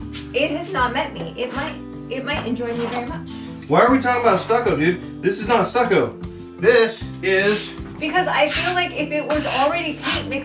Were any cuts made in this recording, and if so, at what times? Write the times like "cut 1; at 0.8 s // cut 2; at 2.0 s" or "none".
none